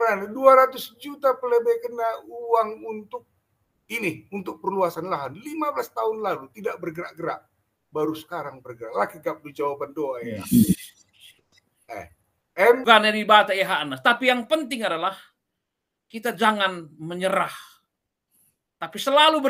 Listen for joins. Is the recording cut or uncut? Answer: cut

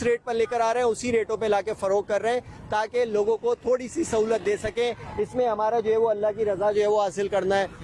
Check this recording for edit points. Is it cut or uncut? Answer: uncut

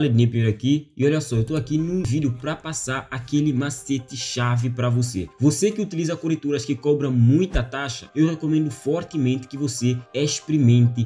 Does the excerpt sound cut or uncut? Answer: cut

